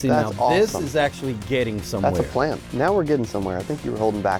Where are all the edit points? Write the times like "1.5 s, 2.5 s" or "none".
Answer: 2.6 s